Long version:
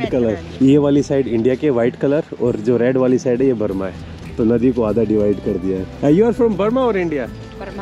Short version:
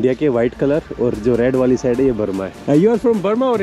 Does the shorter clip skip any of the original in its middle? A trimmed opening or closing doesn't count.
yes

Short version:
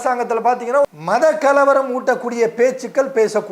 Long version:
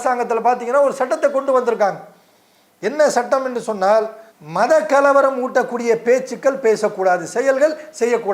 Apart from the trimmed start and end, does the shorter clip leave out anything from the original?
yes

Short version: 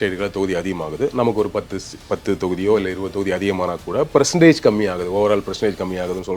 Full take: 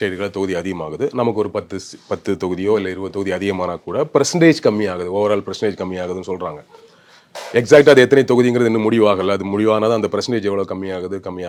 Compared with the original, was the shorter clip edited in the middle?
no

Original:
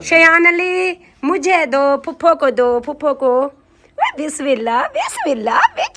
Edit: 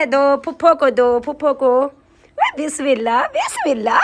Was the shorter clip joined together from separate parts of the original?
no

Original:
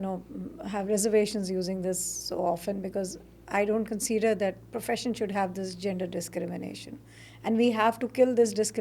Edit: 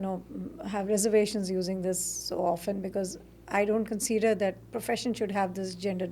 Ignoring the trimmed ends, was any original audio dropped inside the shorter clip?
no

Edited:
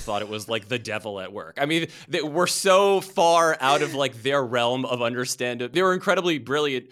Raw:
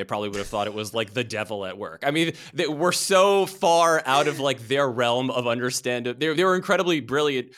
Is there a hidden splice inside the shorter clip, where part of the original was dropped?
yes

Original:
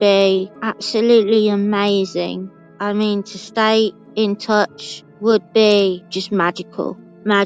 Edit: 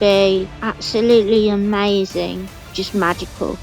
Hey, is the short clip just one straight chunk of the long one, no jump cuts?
no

